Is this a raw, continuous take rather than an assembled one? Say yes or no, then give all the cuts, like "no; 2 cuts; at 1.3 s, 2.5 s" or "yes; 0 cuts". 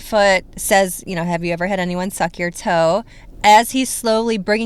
yes; 0 cuts